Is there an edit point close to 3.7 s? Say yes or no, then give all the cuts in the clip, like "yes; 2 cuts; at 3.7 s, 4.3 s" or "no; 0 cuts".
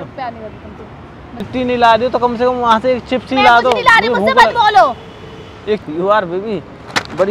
no; 2 cuts; at 1.4 s, 5.8 s